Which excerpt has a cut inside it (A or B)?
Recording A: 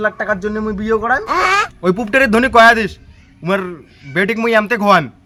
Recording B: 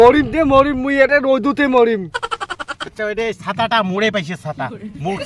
B